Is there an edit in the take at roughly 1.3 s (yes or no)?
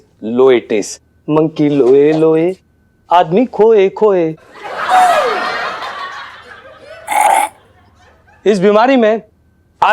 no